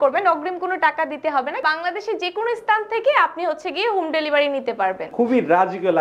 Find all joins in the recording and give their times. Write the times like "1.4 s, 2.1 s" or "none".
1.6 s, 5.0 s